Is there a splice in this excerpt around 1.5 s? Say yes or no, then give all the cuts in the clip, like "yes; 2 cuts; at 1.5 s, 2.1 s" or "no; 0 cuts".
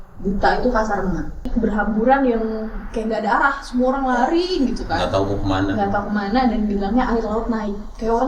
yes; 1 cut; at 1.5 s